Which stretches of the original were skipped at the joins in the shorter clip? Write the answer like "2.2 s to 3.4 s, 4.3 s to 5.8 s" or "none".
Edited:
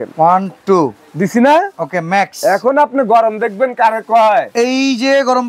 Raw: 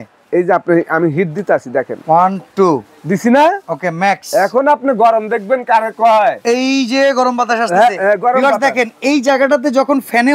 none